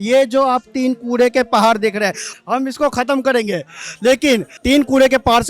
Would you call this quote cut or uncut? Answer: cut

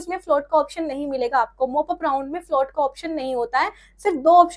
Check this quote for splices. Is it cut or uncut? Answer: uncut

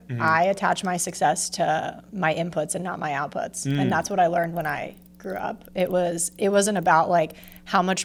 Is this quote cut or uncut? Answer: uncut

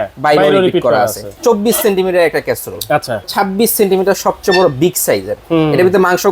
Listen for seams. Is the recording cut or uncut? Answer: cut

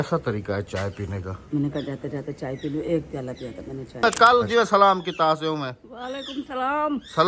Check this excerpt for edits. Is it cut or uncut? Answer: cut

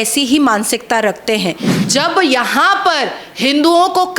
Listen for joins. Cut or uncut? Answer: cut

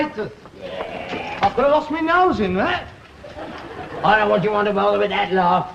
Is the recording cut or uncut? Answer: uncut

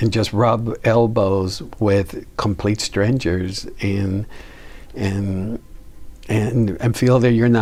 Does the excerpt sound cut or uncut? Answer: uncut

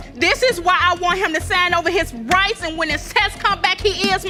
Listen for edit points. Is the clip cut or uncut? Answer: uncut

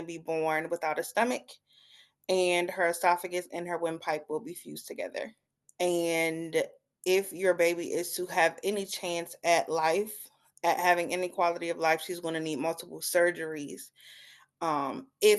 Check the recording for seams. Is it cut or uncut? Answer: uncut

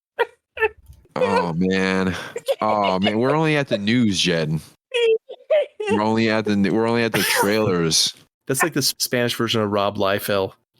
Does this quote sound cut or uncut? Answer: cut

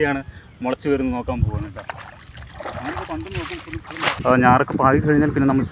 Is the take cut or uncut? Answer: cut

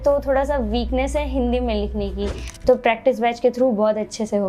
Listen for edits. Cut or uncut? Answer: cut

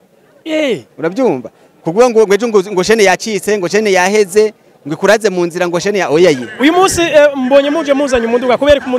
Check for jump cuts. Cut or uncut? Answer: cut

